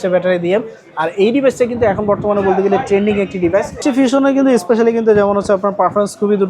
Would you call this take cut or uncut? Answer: cut